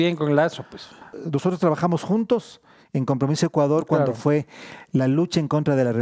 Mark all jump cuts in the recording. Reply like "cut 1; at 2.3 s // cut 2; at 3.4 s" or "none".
cut 1; at 1.1 s